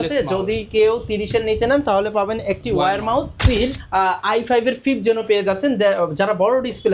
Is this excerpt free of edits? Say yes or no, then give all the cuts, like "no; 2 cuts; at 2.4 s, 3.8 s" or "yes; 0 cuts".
no; 1 cut; at 3.4 s